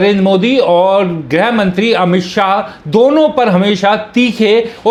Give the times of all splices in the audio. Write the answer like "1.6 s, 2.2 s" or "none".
none